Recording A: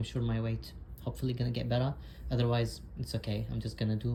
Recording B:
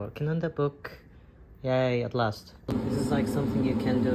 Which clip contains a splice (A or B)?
B